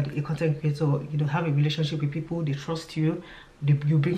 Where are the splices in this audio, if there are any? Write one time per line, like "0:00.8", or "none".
none

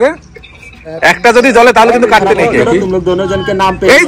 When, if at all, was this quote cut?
0:02.6

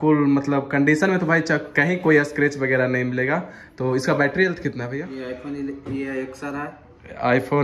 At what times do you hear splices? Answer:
0:05.0

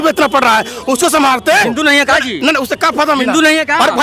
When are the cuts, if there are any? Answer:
0:01.6

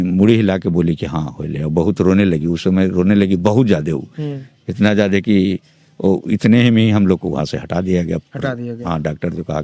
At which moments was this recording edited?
none

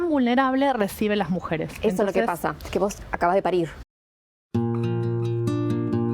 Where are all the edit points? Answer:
0:02.6
0:03.8

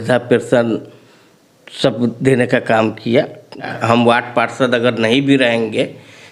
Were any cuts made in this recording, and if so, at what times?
0:03.7

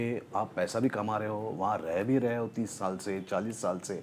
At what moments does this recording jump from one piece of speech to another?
none

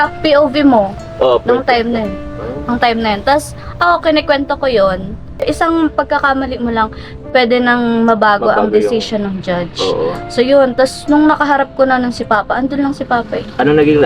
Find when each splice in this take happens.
0:05.4

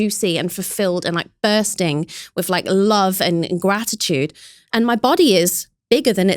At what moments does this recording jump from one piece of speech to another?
none

